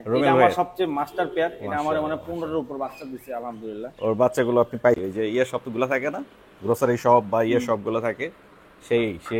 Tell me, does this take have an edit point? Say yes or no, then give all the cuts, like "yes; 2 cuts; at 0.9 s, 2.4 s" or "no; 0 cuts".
yes; 1 cut; at 5.0 s